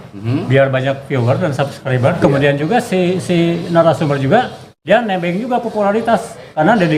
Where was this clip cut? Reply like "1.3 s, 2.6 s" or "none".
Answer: 2.2 s

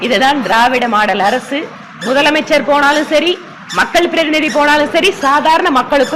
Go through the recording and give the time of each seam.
none

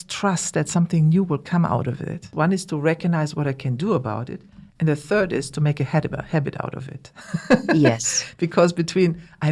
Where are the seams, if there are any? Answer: 2.2 s

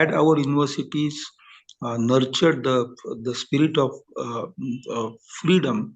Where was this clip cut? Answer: none

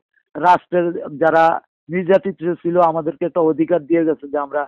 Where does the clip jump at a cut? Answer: none

